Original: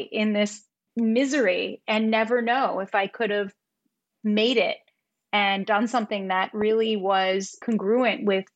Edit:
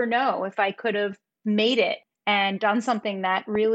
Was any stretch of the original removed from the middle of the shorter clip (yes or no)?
yes